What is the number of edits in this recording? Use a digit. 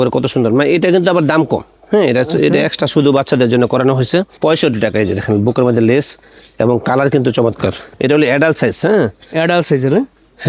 0